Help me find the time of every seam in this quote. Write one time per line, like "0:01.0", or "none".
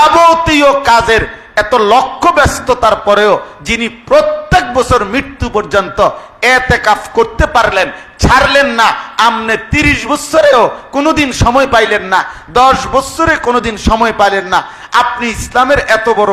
none